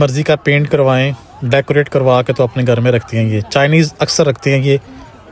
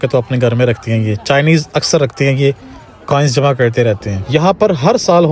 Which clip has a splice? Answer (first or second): second